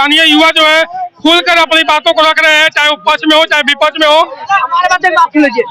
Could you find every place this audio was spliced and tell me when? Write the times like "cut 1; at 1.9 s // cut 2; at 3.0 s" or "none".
cut 1; at 4.5 s